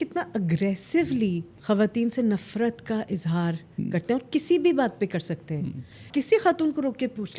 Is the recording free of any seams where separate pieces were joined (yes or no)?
no